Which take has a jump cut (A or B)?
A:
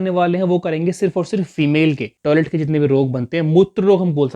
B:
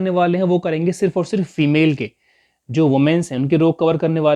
A